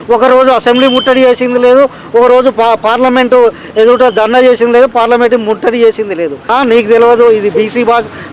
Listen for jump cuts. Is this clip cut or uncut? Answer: cut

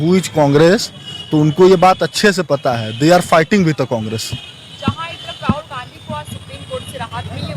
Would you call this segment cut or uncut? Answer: uncut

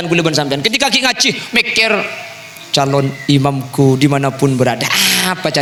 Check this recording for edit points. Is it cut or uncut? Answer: uncut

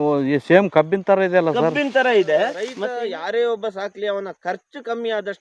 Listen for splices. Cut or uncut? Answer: cut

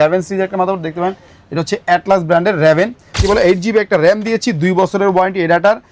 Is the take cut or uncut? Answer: cut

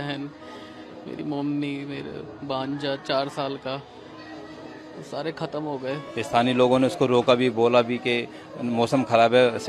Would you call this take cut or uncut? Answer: cut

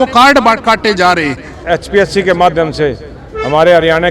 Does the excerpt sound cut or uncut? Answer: cut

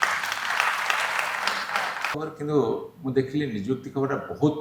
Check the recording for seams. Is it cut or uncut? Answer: cut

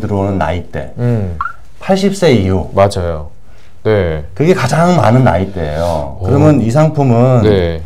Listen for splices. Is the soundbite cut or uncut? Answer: uncut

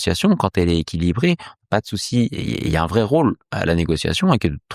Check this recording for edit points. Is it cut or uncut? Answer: uncut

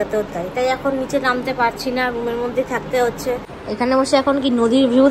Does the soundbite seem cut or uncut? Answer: cut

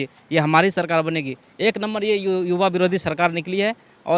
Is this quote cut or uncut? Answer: uncut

